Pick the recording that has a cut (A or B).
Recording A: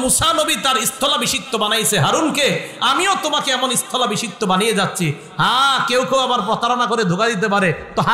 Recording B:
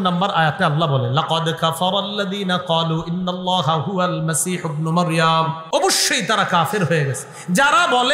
B